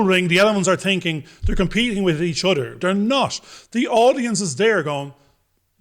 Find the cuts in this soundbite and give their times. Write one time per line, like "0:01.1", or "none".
none